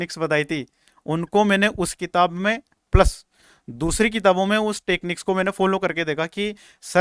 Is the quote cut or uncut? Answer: uncut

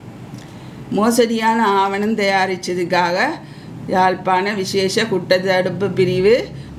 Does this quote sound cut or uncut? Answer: uncut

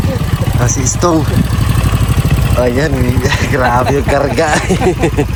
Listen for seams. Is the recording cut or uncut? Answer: uncut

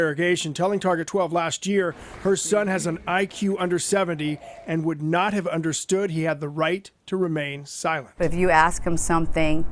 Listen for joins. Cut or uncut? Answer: cut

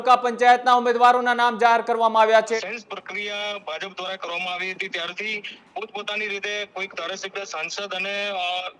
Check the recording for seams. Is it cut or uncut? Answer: cut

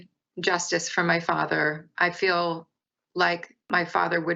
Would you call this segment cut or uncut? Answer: cut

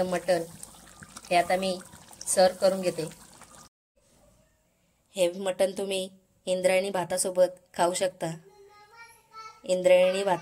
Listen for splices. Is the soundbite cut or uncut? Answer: cut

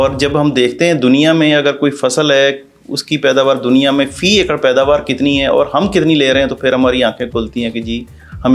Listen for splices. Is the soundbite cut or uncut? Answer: uncut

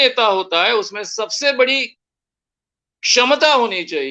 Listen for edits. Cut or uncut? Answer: uncut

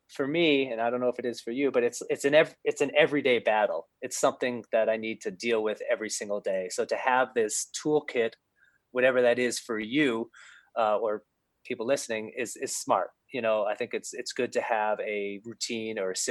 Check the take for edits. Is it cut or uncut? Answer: uncut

